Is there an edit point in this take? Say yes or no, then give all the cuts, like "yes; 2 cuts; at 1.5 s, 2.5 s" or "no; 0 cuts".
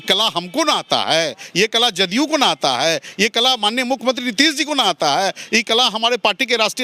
no; 0 cuts